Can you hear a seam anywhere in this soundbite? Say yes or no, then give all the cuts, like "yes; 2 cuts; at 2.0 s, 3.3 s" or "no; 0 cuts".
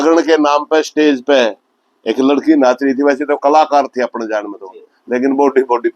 no; 0 cuts